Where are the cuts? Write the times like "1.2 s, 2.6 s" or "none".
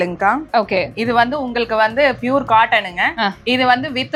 none